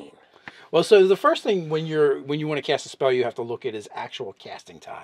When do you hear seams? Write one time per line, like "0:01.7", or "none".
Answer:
0:02.3

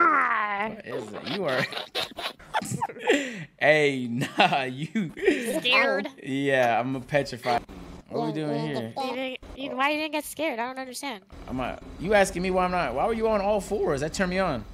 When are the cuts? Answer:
0:07.6

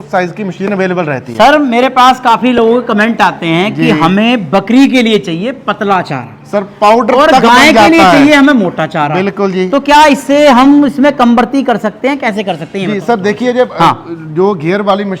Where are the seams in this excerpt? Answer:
none

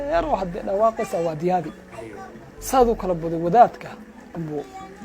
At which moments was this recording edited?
0:02.5

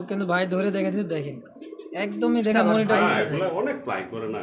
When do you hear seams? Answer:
0:03.0

